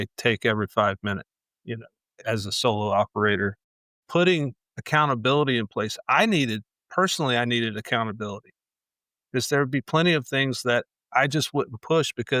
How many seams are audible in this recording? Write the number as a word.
zero